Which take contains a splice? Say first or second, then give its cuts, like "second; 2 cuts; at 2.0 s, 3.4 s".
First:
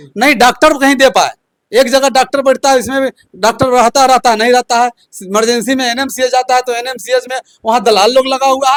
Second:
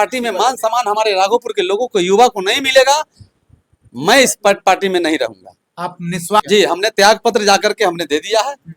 second; 1 cut; at 6.4 s